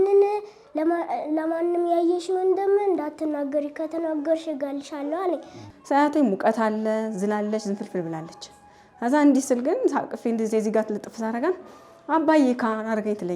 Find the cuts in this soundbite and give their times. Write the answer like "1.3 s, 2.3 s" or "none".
5.6 s

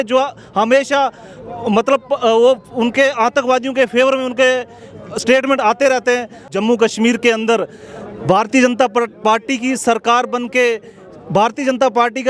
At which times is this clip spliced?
6.4 s

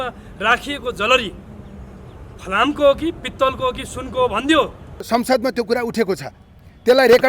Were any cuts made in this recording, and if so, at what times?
5.1 s

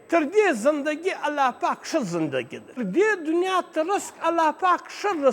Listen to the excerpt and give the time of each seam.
2.8 s

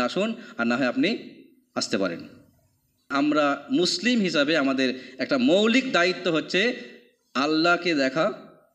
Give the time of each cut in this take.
3.1 s

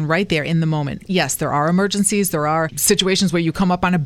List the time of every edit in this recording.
1.0 s, 2.7 s

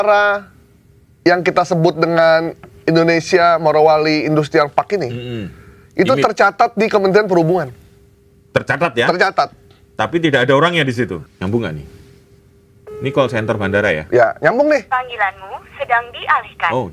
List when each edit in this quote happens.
11.2 s

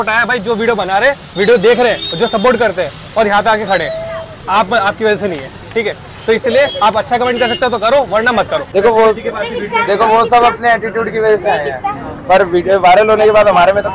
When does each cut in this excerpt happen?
8.7 s

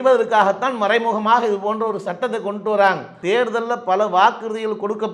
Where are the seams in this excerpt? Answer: 3.1 s

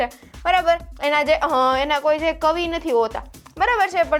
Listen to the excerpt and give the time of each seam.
none

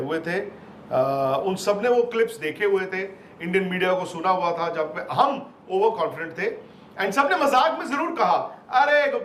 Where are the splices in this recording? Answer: none

